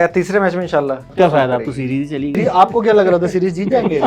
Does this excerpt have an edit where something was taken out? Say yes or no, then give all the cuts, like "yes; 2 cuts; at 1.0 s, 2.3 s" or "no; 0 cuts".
yes; 2 cuts; at 1.1 s, 2.4 s